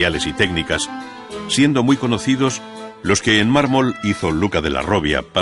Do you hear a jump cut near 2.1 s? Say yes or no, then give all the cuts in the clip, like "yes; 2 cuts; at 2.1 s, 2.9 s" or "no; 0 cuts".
no; 1 cut; at 3.9 s